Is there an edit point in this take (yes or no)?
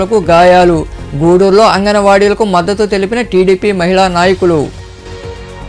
no